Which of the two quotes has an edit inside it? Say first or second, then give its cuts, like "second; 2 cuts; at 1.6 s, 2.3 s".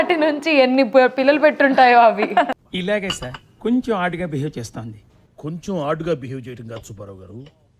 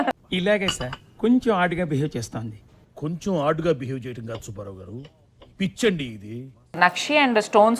second; 1 cut; at 6.7 s